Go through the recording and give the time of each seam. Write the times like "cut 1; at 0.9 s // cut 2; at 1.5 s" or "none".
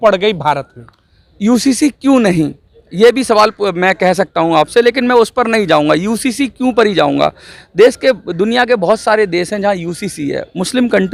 none